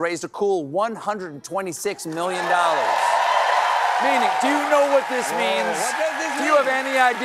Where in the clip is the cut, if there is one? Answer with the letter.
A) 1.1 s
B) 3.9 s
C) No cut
C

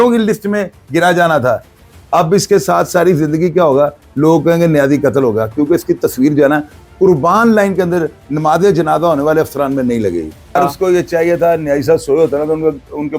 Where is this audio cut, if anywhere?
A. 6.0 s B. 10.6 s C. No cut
B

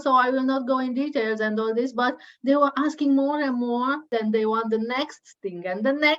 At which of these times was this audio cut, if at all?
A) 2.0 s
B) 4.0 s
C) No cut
B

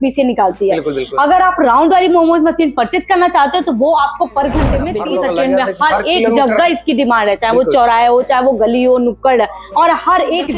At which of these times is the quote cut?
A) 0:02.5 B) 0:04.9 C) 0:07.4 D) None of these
B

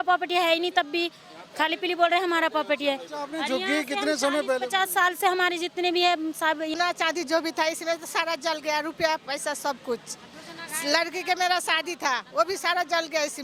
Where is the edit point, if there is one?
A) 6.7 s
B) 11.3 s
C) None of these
A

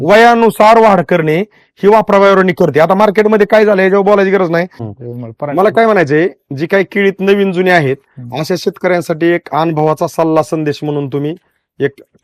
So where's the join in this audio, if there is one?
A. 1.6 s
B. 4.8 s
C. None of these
B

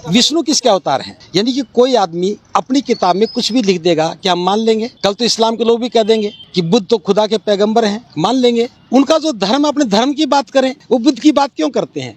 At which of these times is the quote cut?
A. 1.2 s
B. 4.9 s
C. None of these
A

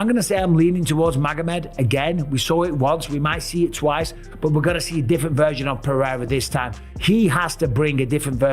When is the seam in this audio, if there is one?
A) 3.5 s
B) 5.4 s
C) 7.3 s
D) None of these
D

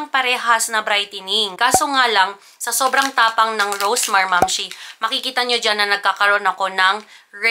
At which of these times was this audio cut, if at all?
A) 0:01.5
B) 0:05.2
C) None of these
A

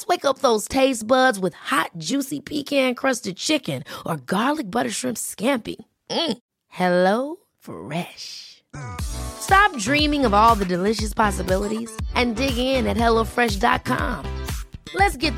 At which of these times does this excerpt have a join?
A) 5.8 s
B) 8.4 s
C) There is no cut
C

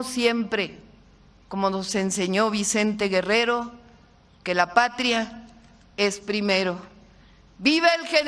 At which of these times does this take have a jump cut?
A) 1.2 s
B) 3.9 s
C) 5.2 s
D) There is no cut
D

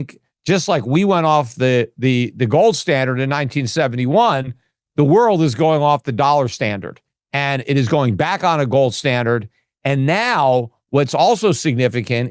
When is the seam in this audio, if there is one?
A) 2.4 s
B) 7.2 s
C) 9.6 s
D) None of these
D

